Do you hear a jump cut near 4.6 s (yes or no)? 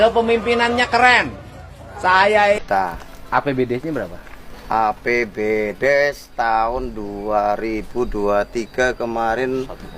no